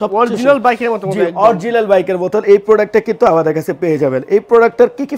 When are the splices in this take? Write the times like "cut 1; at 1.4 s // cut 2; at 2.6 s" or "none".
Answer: none